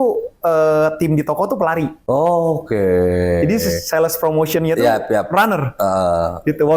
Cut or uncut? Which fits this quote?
cut